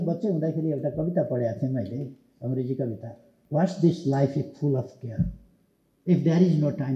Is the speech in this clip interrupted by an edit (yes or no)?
yes